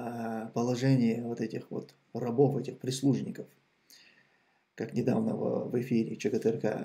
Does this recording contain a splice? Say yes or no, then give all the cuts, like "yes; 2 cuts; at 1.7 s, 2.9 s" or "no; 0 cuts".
no; 0 cuts